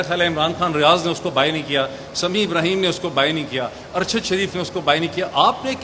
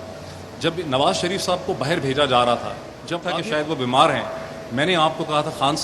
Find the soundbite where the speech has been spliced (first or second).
second